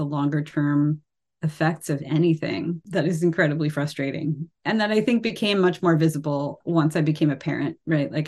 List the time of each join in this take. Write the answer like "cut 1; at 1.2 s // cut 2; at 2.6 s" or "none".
cut 1; at 2.8 s // cut 2; at 4.5 s // cut 3; at 6.5 s